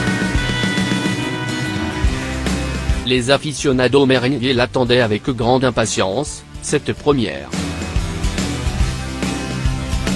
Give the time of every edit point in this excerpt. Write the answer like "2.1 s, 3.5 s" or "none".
3.0 s, 7.5 s